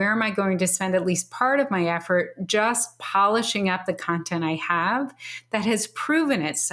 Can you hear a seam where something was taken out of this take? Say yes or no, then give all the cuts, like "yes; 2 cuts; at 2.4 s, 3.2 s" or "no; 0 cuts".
no; 0 cuts